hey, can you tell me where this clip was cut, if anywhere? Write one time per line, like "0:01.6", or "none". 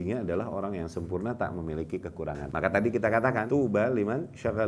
0:02.4
0:03.4